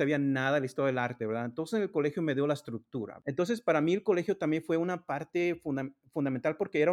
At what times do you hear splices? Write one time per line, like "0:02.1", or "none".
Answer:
0:03.2